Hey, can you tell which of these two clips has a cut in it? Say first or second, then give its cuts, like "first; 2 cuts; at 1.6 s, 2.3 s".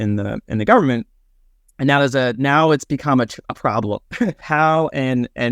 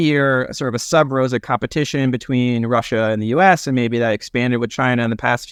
first; 1 cut; at 4.4 s